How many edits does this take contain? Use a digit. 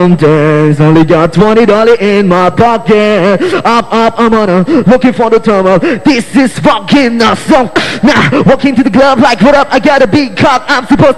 1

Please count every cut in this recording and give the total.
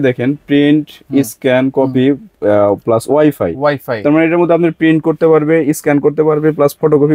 0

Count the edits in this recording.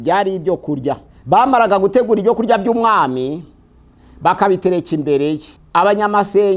2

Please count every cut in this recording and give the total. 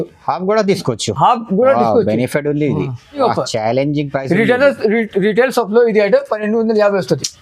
1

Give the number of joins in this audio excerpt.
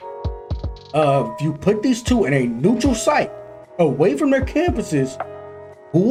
0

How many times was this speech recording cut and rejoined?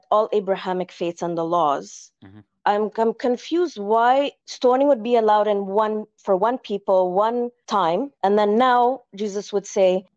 0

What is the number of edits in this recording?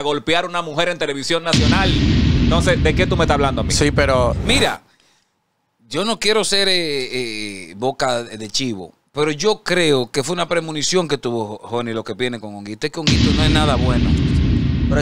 1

